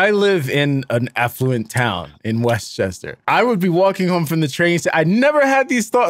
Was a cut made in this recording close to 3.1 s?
yes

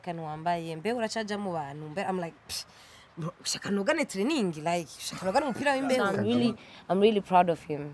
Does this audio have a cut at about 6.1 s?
yes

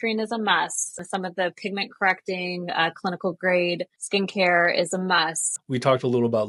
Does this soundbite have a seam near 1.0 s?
yes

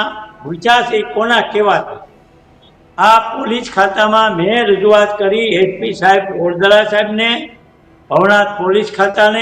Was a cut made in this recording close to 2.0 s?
no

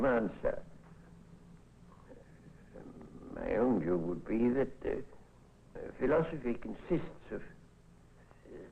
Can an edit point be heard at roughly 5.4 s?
no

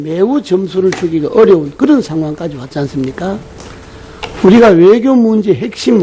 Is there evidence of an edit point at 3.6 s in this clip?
yes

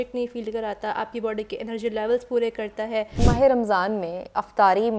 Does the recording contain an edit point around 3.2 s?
yes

